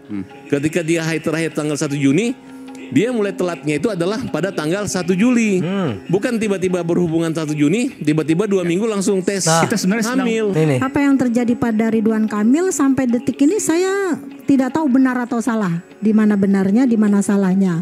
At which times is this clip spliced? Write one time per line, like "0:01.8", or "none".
none